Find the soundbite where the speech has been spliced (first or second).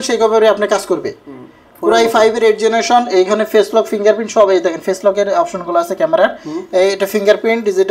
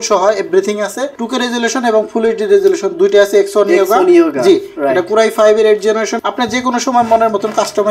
second